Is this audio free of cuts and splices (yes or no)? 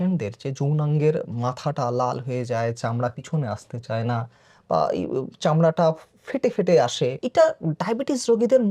no